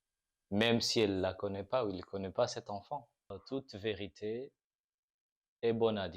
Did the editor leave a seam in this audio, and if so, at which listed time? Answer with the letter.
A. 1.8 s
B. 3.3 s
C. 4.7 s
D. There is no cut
B